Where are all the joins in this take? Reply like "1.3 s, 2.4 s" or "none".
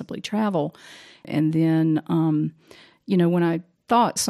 1.3 s

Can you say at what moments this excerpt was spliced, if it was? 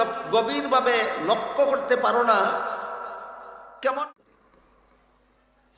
4.0 s

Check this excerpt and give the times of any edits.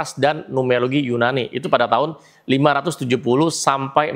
none

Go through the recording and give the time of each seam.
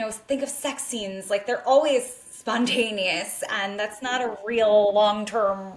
none

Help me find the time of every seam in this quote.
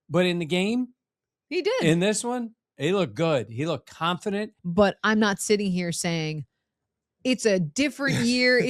4.6 s

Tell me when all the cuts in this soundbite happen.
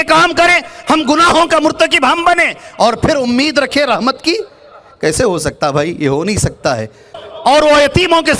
7.1 s

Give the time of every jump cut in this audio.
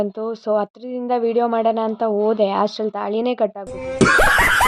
3.7 s

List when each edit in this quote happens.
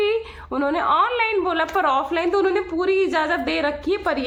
none

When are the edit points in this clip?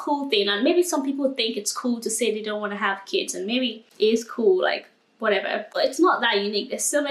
5.6 s

